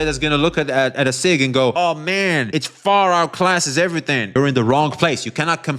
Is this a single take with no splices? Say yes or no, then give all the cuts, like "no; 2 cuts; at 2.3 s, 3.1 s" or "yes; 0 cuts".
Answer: no; 1 cut; at 4.4 s